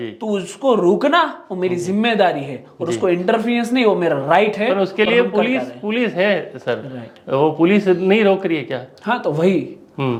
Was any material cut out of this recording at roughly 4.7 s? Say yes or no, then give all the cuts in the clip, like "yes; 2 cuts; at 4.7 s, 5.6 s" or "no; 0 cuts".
no; 0 cuts